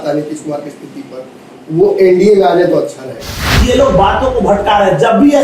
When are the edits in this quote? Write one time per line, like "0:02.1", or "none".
0:03.5